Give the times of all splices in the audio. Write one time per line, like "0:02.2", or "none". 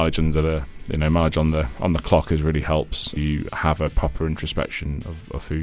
0:03.2